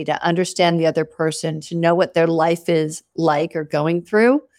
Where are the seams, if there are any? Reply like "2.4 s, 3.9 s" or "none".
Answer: none